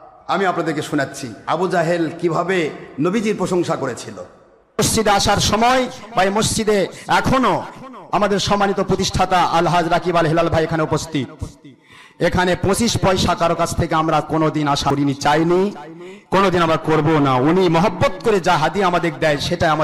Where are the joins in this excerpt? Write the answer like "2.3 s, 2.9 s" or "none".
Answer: 14.9 s